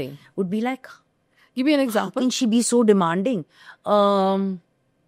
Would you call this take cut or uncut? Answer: uncut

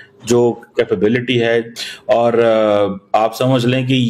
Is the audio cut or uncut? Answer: cut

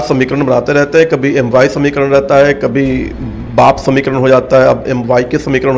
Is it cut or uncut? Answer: uncut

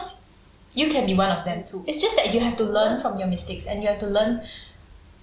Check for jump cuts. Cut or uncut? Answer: uncut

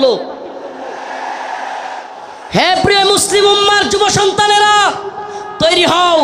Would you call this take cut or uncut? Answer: cut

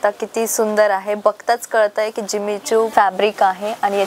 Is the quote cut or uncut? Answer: cut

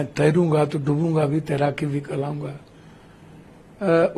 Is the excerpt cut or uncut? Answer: uncut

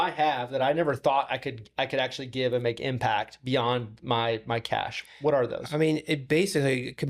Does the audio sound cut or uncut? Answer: uncut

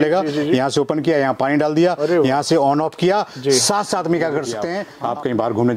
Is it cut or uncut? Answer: cut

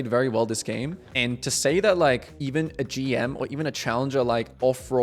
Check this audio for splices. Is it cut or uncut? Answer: uncut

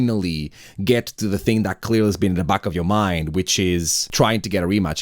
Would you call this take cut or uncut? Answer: cut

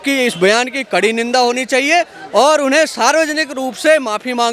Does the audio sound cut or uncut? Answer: uncut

